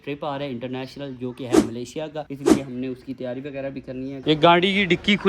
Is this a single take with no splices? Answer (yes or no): no